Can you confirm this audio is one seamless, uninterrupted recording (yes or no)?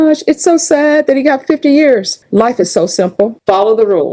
no